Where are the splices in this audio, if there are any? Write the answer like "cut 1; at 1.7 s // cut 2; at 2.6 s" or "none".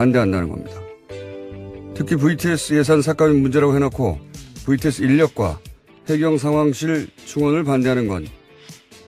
cut 1; at 6.6 s